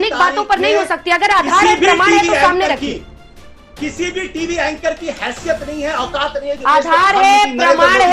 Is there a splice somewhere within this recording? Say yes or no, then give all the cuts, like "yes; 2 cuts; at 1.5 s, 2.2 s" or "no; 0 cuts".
no; 0 cuts